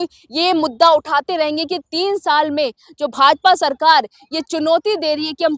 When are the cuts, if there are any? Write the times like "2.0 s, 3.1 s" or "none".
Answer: none